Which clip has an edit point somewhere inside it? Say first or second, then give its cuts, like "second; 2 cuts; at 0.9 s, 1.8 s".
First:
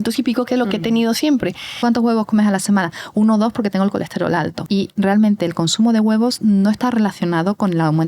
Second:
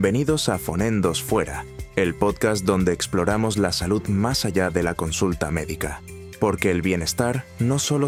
first; 2 cuts; at 1.7 s, 4.6 s